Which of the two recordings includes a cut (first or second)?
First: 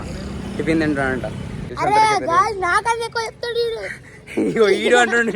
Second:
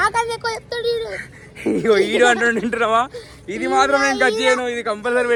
first